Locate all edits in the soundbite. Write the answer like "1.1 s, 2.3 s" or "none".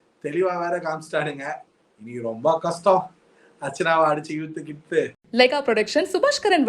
5.2 s